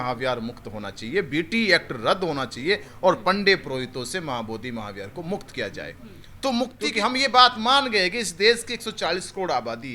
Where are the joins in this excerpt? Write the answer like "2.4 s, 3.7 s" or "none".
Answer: 6.7 s